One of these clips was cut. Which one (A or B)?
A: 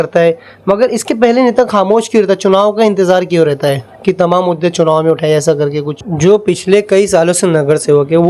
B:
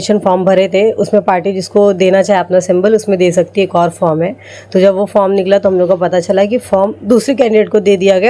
A